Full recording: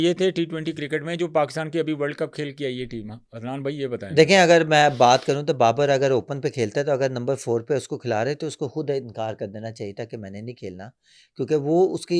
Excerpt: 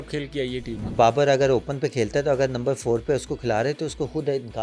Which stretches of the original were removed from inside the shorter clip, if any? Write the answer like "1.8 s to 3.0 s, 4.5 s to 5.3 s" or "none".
3.2 s to 5.6 s